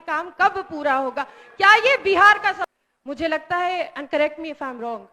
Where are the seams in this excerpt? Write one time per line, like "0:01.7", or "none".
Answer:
0:02.7